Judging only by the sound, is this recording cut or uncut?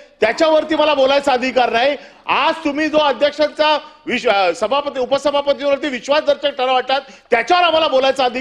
uncut